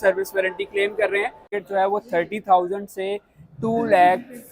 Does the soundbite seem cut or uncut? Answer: cut